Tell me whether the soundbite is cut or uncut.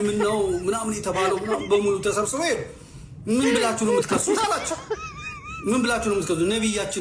uncut